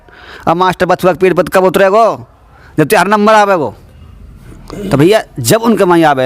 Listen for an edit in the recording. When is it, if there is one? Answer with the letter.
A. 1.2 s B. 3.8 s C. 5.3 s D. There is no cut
D